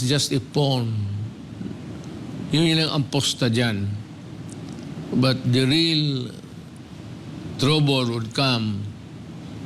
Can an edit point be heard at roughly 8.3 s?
no; 0 cuts

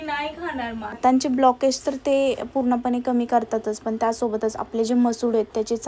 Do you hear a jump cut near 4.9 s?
no; 1 cut; at 1.0 s

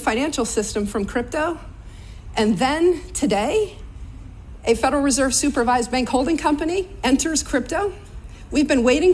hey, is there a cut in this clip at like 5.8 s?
no; 2 cuts; at 1.3 s, 3.4 s

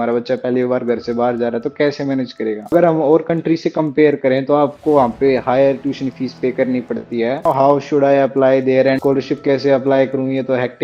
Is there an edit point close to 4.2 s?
no; 3 cuts; at 2.7 s, 7.5 s, 9.0 s

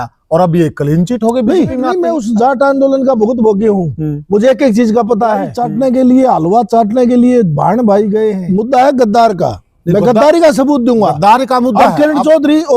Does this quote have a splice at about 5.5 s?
yes; 3 cuts; at 2.0 s, 5.5 s, 8.4 s

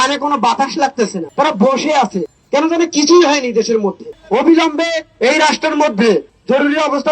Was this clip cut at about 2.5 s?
no; 2 cuts; at 1.3 s, 4.2 s

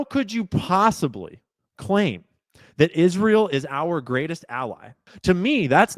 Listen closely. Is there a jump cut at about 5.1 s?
yes; 1 cut; at 5.1 s

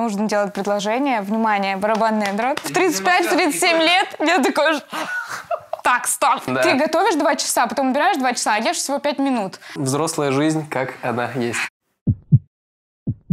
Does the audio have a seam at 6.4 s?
yes; 3 cuts; at 2.6 s, 6.4 s, 9.7 s

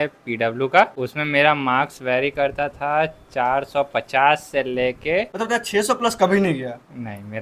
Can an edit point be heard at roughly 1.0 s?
yes; 2 cuts; at 1.0 s, 5.3 s

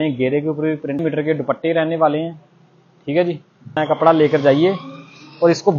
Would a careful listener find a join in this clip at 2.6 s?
no; 2 cuts; at 1.0 s, 3.8 s

